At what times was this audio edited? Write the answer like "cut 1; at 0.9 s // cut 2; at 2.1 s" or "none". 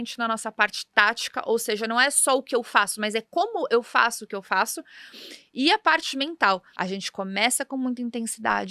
cut 1; at 6.7 s